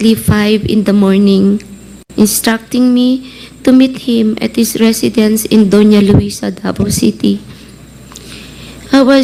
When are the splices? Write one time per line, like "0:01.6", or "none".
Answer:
none